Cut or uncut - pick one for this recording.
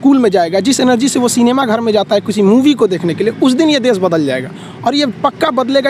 uncut